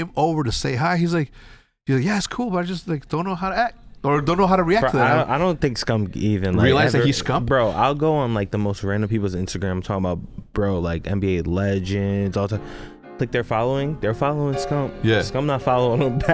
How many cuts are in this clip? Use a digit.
0